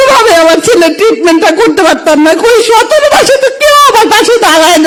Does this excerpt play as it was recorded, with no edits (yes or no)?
yes